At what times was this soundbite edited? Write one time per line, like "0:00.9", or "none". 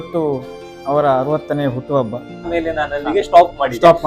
0:02.5